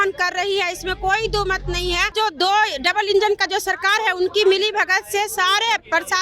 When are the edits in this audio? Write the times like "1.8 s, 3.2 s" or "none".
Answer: 2.1 s